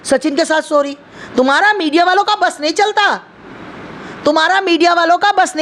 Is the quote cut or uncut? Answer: uncut